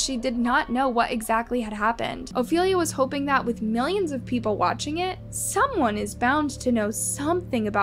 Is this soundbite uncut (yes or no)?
no